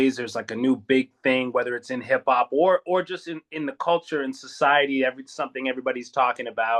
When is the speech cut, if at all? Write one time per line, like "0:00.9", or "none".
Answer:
none